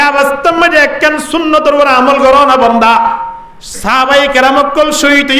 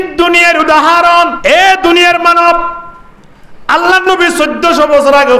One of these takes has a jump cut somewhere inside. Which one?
second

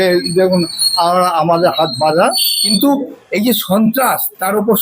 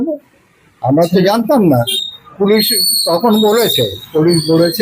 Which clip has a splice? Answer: first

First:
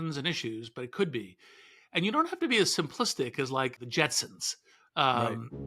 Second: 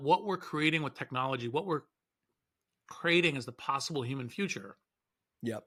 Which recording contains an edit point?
first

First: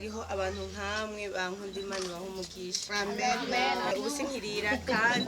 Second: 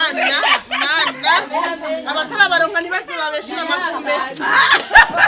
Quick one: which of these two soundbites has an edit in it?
first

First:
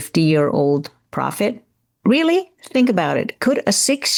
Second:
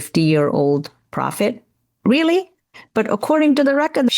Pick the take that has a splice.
second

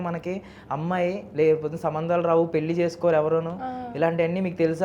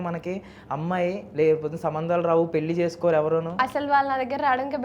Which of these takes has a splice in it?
second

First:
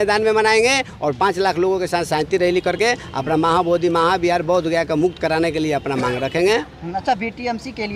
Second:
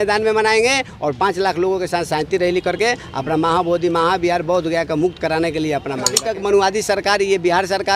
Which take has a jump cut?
second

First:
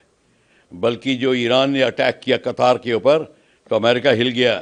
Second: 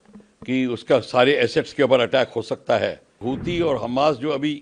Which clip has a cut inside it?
second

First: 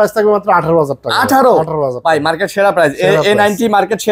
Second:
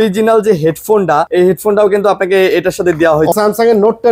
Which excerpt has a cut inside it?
second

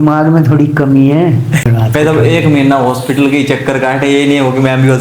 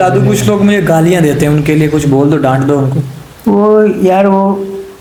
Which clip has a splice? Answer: first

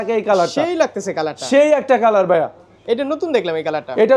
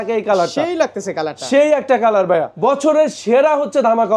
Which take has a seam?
second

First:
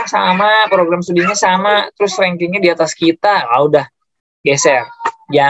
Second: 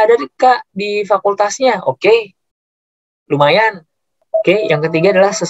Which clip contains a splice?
second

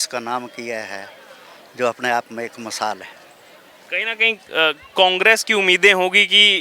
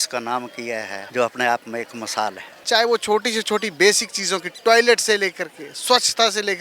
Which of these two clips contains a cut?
second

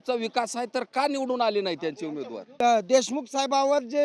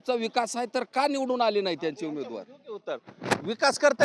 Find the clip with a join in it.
first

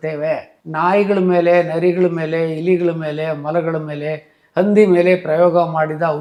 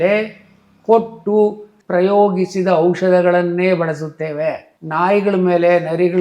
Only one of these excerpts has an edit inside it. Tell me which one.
second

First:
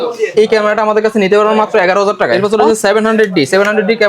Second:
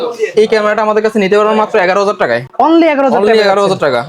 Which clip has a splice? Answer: first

